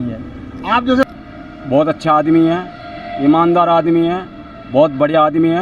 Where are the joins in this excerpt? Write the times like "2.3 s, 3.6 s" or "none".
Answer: 1.1 s

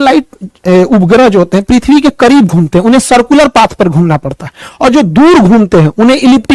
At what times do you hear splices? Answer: none

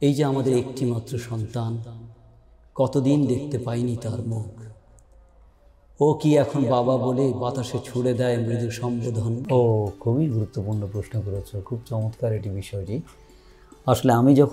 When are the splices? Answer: 9.4 s

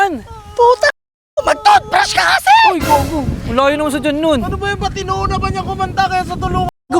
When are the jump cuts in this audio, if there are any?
none

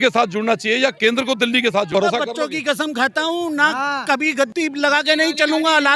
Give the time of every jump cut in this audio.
1.9 s, 4.5 s

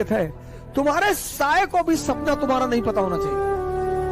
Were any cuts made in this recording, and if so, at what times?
3.1 s

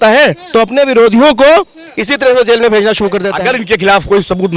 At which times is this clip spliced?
3.3 s

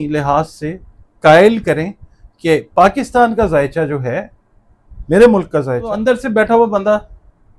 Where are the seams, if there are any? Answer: 5.9 s

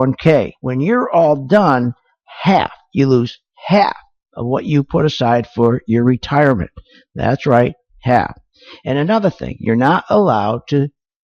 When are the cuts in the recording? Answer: none

